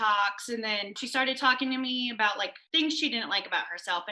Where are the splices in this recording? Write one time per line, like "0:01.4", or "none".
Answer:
0:01.0
0:02.6